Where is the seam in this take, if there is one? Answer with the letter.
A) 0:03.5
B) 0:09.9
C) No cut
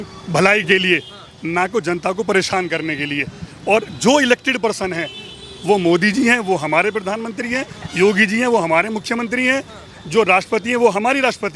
C